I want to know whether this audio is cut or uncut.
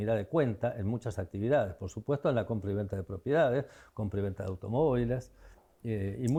uncut